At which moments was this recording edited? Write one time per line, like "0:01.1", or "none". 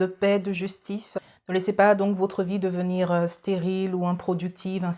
0:01.2